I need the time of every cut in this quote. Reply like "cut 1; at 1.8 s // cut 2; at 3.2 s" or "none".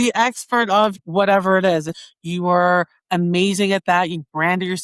cut 1; at 0.9 s // cut 2; at 1.9 s